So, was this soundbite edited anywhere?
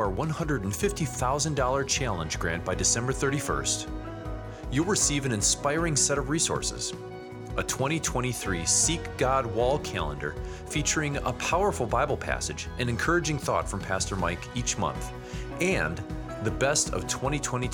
no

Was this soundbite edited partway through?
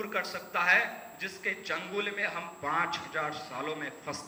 no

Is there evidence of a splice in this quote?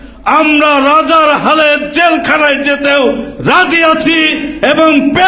no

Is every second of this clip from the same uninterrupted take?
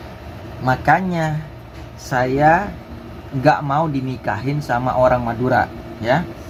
yes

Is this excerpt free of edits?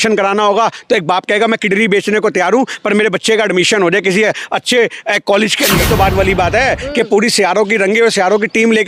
no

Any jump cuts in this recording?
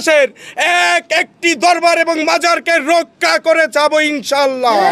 no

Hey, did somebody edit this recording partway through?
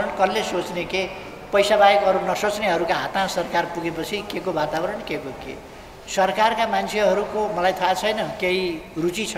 yes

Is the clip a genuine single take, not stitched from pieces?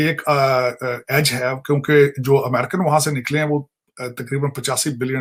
yes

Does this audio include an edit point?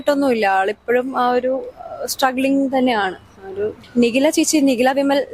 yes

